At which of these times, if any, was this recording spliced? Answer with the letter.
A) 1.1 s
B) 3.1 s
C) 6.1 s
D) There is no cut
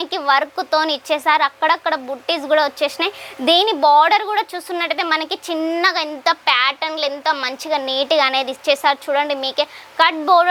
D